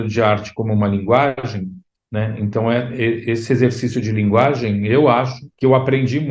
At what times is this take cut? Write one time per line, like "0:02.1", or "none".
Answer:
0:05.4

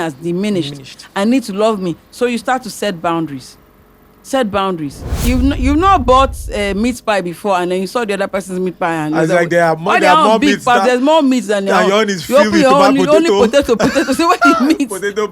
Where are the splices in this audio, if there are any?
0:05.2

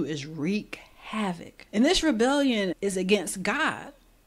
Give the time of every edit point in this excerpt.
0:01.5

